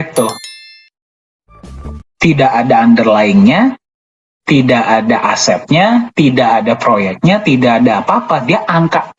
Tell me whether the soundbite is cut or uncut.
uncut